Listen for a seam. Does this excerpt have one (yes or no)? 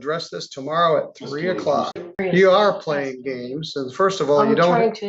yes